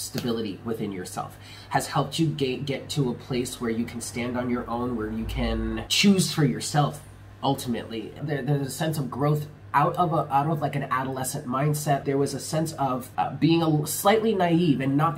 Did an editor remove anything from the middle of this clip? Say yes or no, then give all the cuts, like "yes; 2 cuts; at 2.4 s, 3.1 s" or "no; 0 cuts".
yes; 4 cuts; at 5.9 s, 8.2 s, 12.0 s, 13.1 s